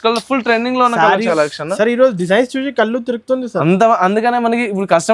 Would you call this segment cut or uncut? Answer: cut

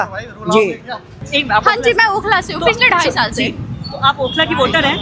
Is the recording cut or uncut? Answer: cut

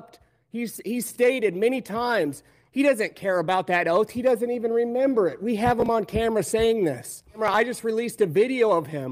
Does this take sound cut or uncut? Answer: cut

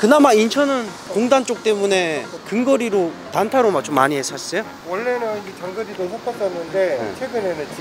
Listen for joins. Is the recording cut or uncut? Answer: uncut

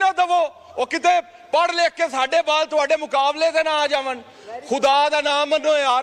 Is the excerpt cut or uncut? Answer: uncut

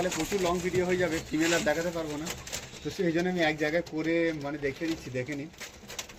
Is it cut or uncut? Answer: uncut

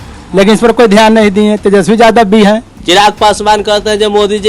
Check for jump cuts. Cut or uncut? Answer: cut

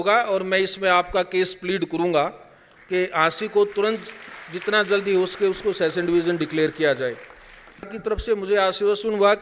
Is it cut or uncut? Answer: cut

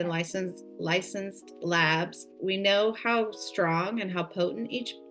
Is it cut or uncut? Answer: cut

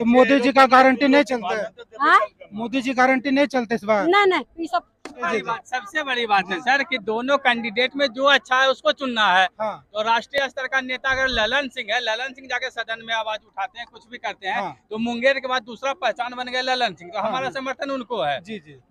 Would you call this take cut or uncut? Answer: uncut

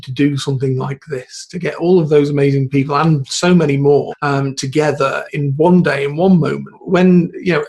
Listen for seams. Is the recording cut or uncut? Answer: cut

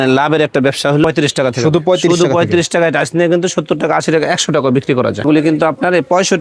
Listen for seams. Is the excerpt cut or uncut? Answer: cut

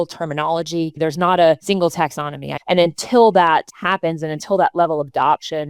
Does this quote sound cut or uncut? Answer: cut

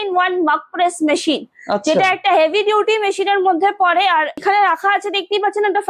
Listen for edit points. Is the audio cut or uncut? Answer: cut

